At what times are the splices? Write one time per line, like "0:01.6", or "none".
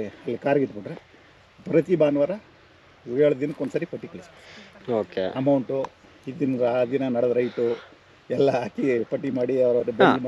none